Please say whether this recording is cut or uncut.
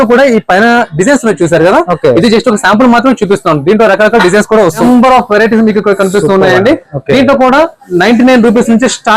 cut